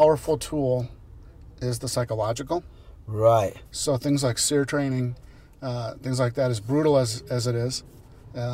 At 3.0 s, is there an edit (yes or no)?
no